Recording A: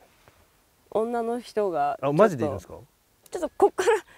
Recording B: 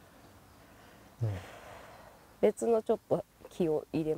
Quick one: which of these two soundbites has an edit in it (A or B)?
A